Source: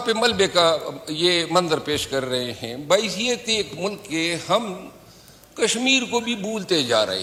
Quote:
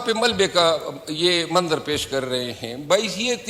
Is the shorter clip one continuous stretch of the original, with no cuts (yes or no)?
yes